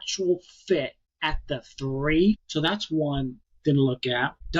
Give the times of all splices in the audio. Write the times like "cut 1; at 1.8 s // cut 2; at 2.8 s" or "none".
cut 1; at 2.4 s